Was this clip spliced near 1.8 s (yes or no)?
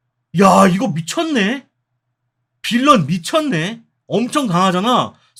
no